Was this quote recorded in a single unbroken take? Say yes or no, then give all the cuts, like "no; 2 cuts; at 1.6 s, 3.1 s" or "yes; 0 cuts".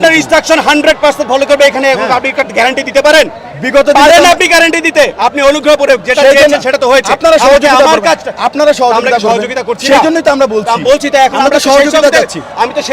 yes; 0 cuts